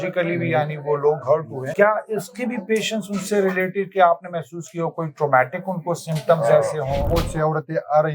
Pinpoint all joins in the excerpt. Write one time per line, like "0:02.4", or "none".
0:01.6
0:07.1